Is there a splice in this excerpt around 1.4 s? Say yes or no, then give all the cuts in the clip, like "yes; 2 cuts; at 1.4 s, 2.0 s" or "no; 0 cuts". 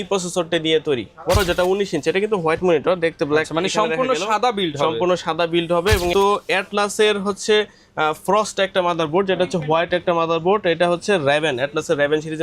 yes; 2 cuts; at 1.4 s, 6.1 s